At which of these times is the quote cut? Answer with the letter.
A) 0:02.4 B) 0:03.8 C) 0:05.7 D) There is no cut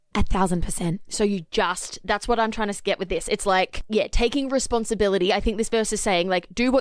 B